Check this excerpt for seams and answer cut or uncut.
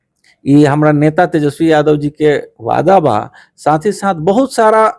uncut